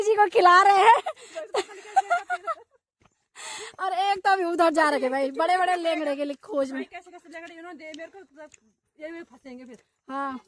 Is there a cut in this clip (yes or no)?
no